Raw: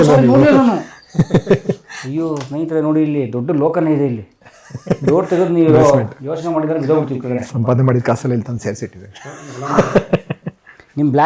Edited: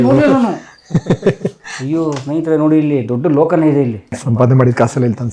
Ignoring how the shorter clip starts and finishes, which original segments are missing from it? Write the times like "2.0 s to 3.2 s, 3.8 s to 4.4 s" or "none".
4.4 s to 7.5 s